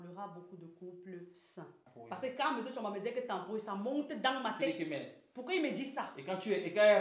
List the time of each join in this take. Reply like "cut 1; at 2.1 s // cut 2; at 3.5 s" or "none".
cut 1; at 1.9 s

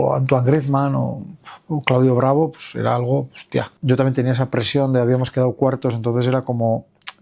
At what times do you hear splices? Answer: cut 1; at 3.7 s

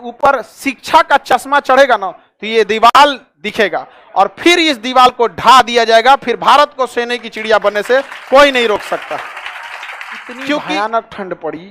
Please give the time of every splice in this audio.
cut 1; at 10.6 s

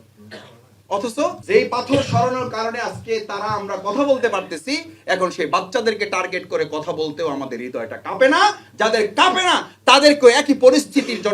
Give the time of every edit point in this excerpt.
cut 1; at 1.4 s

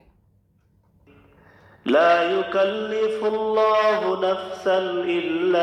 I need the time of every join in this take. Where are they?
none

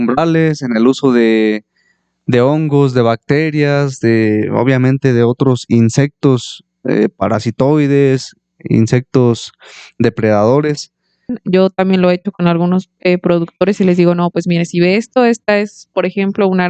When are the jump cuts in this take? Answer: cut 1; at 11.4 s

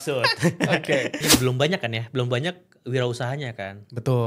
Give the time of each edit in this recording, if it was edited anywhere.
cut 1; at 1.4 s

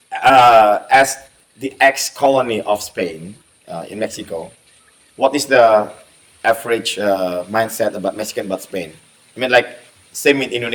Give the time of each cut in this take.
none

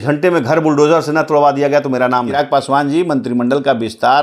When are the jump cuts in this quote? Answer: cut 1; at 2.3 s

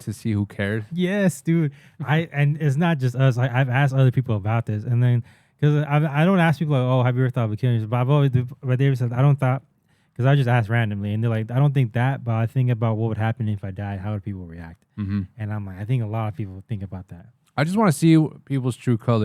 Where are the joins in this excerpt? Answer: none

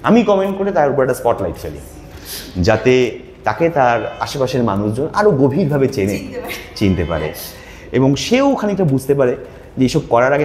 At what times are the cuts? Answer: none

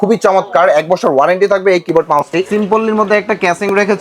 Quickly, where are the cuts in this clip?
cut 1; at 2.5 s

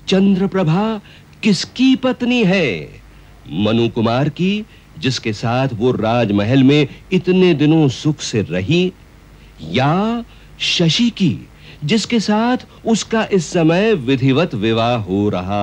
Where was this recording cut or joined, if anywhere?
none

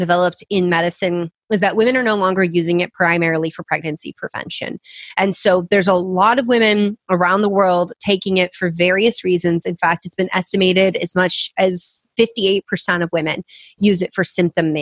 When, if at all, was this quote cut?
none

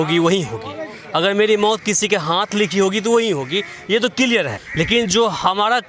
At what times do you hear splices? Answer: cut 1; at 4.6 s

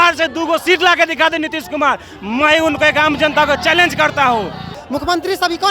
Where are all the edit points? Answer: cut 1; at 4.7 s

